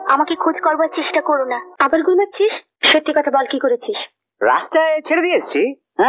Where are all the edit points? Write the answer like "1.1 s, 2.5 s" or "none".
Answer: 1.6 s, 2.7 s